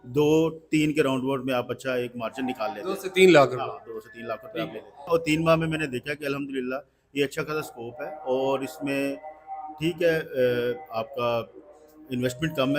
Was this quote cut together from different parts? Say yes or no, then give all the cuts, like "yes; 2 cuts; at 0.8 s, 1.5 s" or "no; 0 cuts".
yes; 1 cut; at 5.1 s